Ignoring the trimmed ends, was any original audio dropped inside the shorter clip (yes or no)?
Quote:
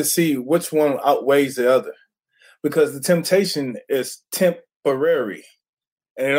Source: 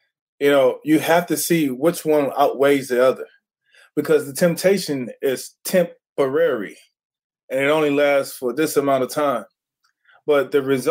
no